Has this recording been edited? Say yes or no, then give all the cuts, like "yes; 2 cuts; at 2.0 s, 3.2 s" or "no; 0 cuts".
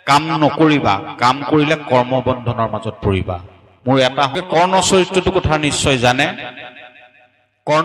yes; 1 cut; at 4.3 s